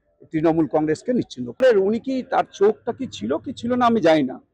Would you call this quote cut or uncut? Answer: cut